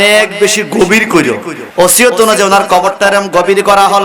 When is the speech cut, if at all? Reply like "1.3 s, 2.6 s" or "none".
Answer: 1.5 s